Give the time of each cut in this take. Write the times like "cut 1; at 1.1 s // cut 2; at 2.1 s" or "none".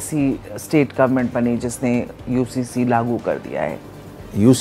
cut 1; at 3.7 s